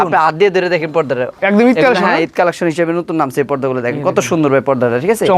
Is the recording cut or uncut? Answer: cut